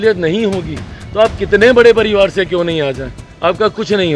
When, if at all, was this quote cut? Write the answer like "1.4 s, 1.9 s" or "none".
none